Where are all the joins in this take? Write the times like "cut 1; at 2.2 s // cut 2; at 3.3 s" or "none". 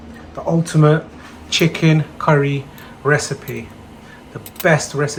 none